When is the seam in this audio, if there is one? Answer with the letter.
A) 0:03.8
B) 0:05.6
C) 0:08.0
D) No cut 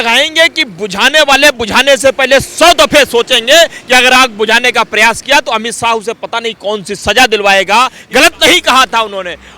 C